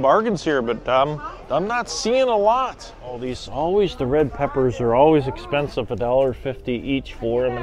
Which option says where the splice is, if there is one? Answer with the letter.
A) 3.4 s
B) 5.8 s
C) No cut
A